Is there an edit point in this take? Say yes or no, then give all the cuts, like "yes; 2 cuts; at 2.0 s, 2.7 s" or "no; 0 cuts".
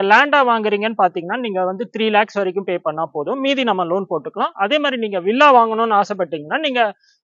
no; 0 cuts